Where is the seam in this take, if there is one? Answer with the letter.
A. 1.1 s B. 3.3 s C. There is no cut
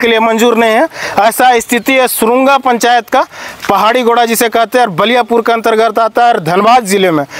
C